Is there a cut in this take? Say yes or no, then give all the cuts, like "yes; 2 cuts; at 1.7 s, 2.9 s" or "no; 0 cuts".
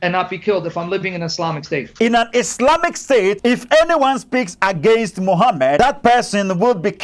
yes; 3 cuts; at 1.9 s, 3.4 s, 5.8 s